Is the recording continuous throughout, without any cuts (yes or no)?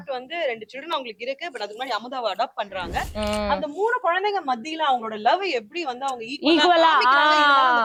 yes